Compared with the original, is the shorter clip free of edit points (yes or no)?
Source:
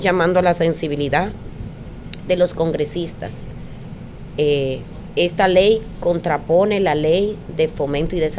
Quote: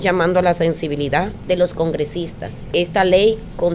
no